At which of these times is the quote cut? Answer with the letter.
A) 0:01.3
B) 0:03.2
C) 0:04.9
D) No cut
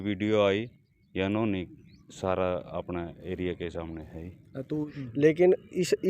C